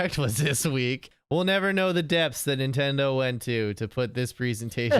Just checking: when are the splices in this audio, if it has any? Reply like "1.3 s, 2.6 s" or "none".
1.0 s